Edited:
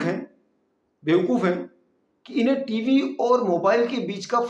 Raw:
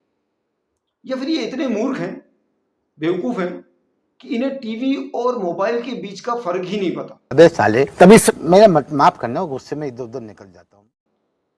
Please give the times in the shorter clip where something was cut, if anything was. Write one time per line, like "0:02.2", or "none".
none